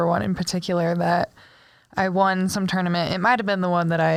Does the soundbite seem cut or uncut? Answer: uncut